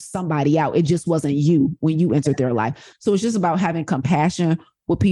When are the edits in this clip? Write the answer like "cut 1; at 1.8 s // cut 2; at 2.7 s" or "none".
cut 1; at 2.9 s

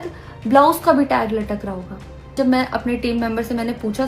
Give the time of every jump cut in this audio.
cut 1; at 2.3 s

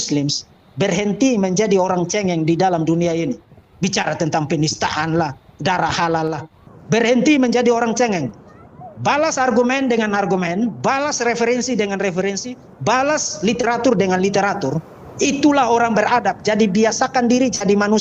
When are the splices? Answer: cut 1; at 3.4 s // cut 2; at 6.4 s

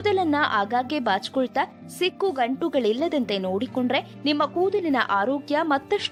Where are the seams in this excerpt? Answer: none

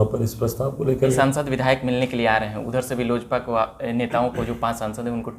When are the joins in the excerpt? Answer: cut 1; at 1.2 s

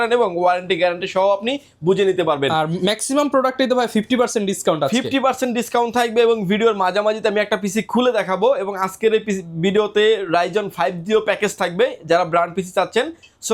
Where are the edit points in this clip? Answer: none

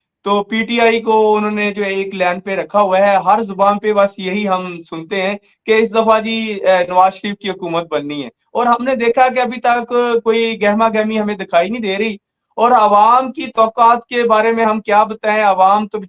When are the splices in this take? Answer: none

